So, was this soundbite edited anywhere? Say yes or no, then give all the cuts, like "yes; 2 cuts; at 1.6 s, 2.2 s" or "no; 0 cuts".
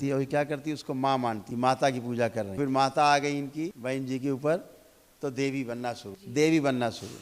yes; 4 cuts; at 1.4 s, 2.6 s, 3.8 s, 6.1 s